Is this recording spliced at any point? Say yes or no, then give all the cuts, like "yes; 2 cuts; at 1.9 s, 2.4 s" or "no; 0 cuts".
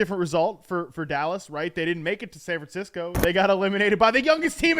yes; 1 cut; at 3.2 s